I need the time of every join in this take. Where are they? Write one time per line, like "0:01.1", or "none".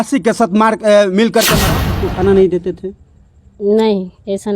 0:01.9